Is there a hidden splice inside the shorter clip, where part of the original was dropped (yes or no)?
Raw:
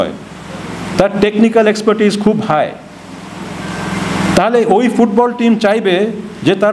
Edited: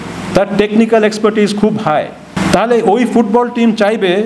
yes